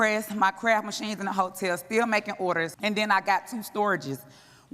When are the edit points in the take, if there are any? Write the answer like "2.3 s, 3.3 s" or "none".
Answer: 2.7 s